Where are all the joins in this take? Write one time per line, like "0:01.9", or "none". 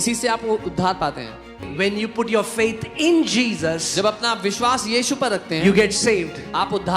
0:01.7